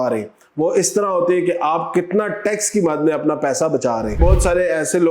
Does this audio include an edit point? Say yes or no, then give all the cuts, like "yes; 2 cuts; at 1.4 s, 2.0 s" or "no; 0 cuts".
yes; 1 cut; at 4.2 s